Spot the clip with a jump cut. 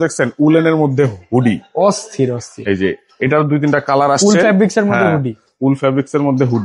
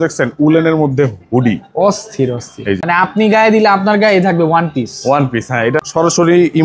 second; 2 cuts; at 2.8 s, 5.9 s

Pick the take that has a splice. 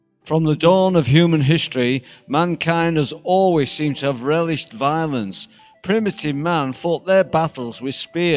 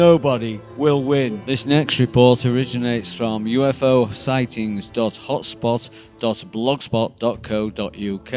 first; 1 cut; at 4.7 s

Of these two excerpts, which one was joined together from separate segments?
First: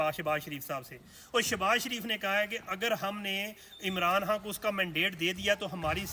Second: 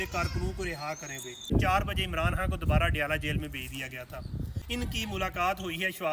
second; 2 cuts; at 1.5 s, 4.6 s

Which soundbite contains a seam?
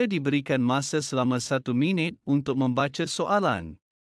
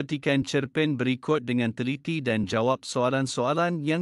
first; 1 cut; at 3.1 s

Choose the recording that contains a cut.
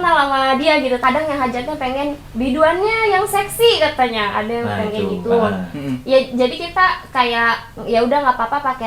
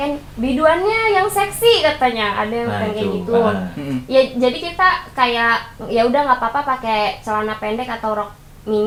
first; 1 cut; at 1.0 s

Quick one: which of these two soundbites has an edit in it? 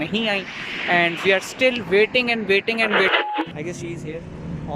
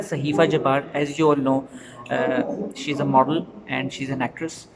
first; 1 cut; at 3.1 s

